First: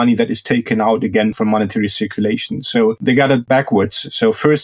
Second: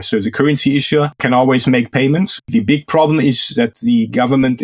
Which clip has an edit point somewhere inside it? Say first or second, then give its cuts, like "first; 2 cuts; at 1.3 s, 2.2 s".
second; 2 cuts; at 2.4 s, 3.8 s